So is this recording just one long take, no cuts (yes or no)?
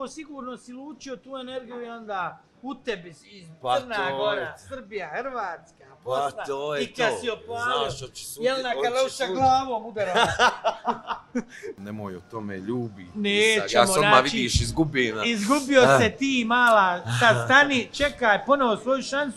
no